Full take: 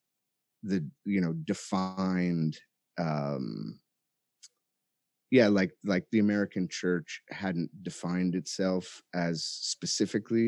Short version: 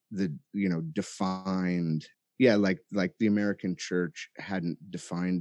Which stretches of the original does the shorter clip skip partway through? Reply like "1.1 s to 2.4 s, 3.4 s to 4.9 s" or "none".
2.7 s to 5.1 s